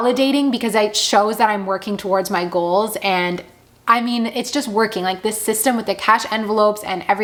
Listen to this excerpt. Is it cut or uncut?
uncut